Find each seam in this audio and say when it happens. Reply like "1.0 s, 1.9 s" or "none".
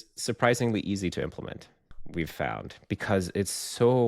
2.0 s